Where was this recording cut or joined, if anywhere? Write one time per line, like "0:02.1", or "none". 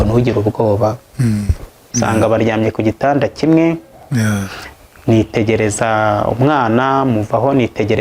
0:01.8